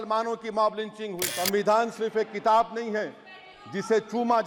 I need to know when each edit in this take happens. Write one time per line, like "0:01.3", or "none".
0:01.3